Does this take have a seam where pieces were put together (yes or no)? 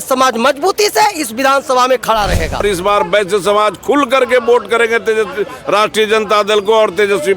yes